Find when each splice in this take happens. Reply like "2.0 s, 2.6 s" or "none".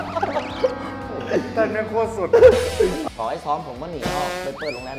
3.0 s